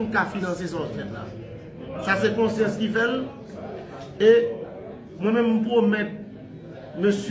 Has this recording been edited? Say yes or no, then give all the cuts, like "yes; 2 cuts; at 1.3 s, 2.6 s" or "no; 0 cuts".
no; 0 cuts